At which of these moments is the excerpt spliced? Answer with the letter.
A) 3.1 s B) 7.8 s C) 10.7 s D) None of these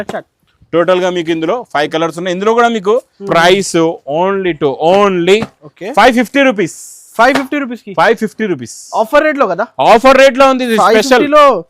A